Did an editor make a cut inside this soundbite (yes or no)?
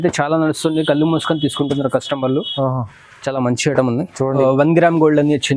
yes